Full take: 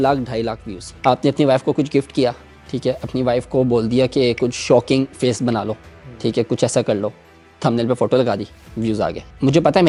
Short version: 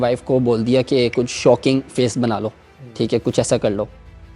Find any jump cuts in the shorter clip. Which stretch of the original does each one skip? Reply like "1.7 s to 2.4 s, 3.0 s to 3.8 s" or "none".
none